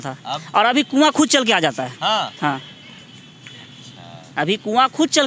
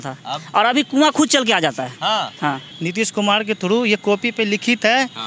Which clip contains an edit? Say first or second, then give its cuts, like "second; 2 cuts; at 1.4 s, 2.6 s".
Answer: second; 1 cut; at 2.7 s